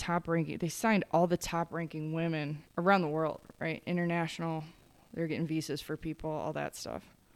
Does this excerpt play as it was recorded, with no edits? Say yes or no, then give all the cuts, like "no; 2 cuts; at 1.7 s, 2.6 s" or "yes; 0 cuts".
no; 1 cut; at 2.6 s